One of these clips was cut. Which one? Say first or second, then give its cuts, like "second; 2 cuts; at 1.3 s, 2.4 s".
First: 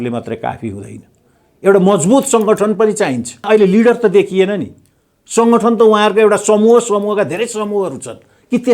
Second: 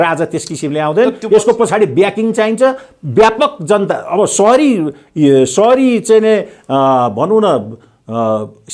first; 1 cut; at 3.4 s